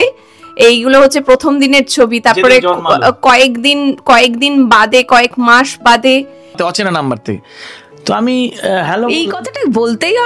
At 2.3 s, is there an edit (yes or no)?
no